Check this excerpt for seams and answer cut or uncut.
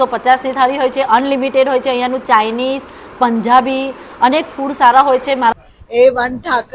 cut